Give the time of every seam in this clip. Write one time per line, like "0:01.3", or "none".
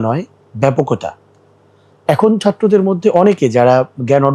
none